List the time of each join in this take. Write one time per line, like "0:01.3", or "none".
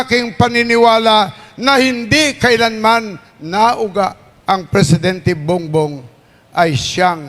0:04.3

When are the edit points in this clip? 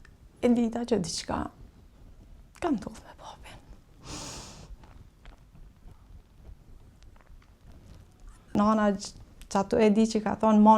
0:08.5

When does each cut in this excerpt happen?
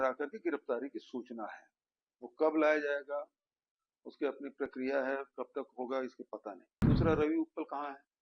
0:06.8

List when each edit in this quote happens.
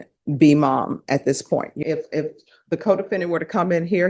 0:01.7

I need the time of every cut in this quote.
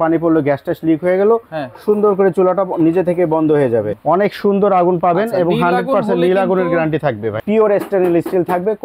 0:03.9
0:07.4

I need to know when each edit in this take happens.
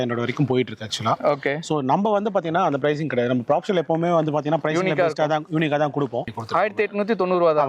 0:06.4

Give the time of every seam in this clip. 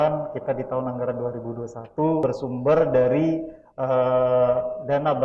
0:02.2

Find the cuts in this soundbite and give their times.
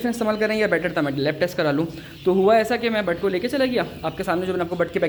none

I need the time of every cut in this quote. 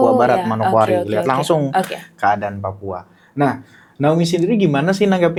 none

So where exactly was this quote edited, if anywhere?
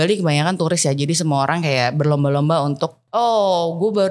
0:03.0

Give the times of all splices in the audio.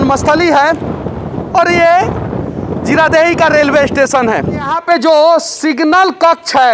0:04.8

